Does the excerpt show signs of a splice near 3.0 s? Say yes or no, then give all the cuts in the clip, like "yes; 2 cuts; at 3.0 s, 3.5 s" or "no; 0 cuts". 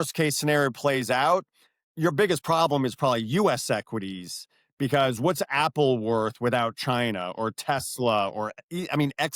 no; 0 cuts